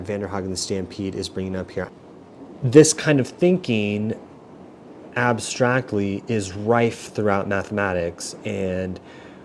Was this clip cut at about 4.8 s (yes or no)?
no